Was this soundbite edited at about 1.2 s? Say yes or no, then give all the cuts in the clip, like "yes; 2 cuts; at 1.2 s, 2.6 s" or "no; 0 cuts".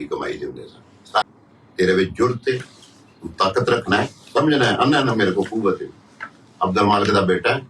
yes; 1 cut; at 1.2 s